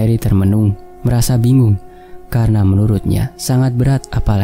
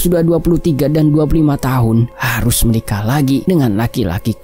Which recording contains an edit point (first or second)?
second